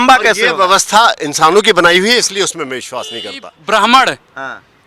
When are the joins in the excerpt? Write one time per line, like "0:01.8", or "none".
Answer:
0:03.5